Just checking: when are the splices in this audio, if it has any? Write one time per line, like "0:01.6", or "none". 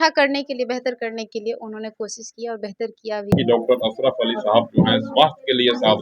0:03.3